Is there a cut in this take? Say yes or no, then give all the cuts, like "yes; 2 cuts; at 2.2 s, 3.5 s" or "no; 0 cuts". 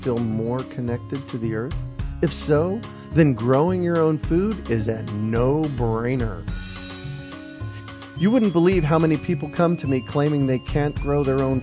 yes; 2 cuts; at 6.4 s, 8.1 s